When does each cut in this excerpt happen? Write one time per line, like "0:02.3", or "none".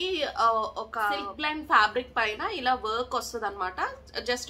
0:01.3